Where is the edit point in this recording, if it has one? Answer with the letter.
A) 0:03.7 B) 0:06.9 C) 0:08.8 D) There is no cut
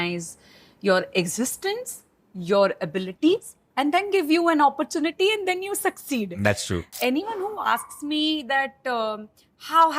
B